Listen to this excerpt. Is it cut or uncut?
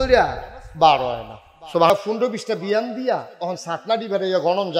cut